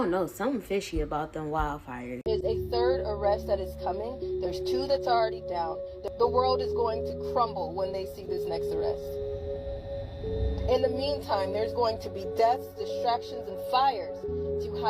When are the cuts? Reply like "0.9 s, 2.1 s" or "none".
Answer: 2.1 s